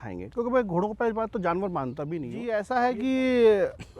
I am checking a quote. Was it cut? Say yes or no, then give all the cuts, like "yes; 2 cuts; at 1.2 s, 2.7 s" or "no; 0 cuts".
yes; 1 cut; at 2.4 s